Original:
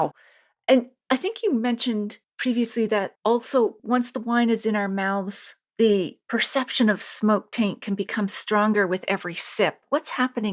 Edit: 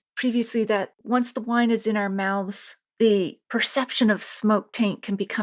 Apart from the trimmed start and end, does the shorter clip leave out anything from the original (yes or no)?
yes